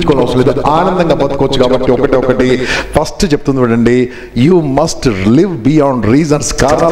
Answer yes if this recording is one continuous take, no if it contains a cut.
yes